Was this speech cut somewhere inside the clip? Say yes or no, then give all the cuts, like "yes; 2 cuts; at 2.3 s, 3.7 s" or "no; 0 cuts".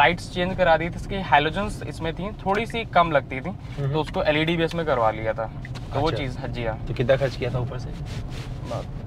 no; 0 cuts